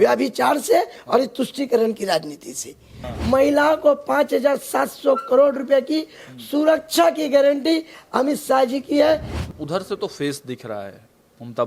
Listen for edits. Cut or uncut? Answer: cut